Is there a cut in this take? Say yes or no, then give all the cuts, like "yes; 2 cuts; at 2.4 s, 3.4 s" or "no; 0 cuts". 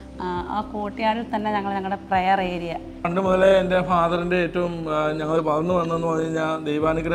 no; 0 cuts